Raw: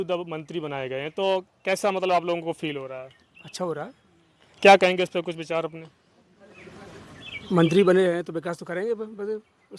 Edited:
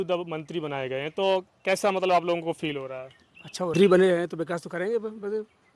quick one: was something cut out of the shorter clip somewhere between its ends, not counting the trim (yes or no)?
yes